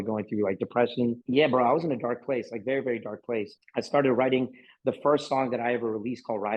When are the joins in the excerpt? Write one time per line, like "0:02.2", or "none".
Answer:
none